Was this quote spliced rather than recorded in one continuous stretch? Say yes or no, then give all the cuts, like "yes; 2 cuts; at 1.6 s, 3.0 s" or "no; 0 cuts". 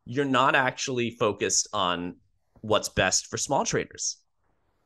no; 0 cuts